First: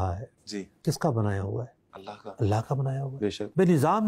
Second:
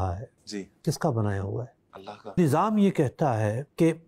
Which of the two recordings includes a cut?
second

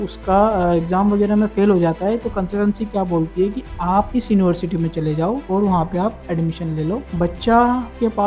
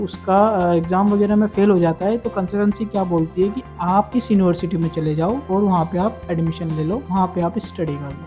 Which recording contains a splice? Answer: first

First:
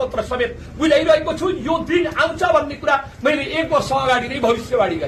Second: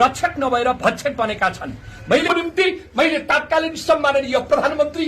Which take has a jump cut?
second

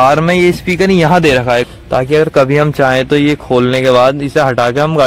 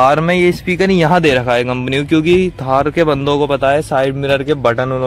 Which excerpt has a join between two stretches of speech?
first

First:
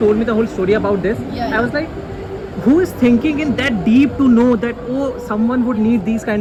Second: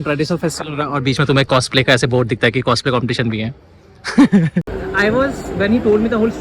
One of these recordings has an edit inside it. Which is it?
second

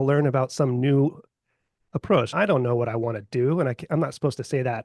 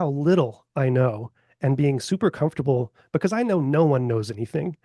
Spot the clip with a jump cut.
first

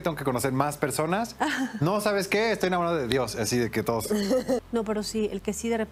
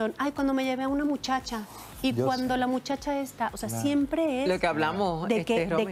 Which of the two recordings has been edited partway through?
first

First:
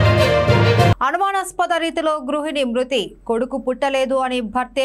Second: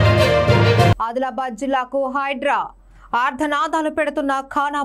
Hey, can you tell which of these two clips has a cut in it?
first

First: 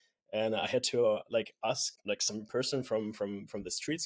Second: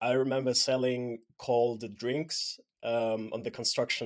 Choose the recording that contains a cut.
first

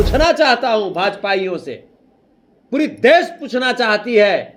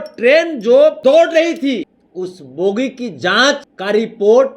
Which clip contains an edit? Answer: second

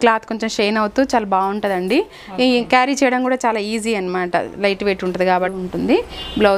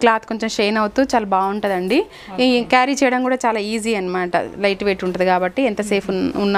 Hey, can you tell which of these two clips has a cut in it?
first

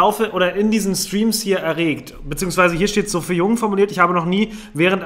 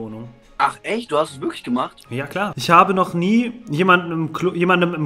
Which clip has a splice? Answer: second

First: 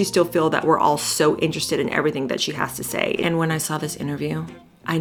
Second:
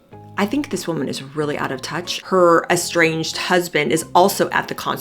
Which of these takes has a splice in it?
second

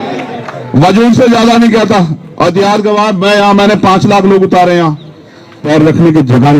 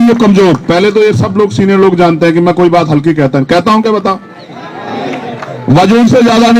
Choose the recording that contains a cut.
first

